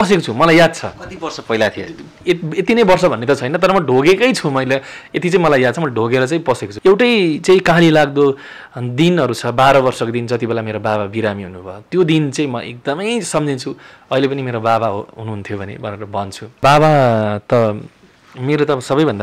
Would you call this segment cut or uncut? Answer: cut